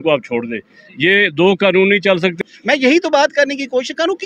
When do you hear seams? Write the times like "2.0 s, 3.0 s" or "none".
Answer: 2.3 s

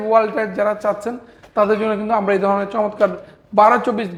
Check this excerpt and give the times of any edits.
none

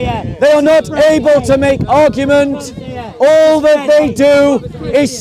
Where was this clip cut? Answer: none

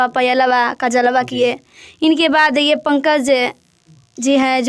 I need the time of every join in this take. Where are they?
none

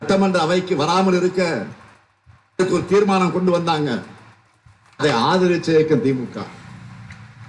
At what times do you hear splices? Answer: none

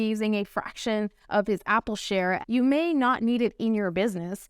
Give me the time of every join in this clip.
2.4 s

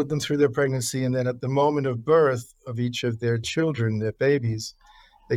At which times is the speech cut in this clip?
none

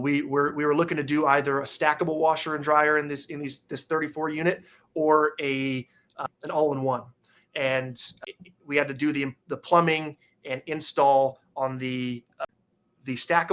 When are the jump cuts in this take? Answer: 6.2 s, 8.2 s, 12.5 s

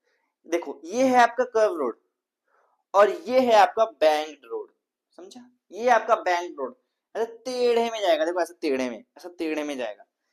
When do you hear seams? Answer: none

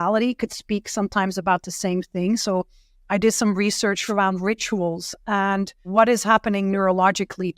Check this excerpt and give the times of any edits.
4.0 s, 5.9 s

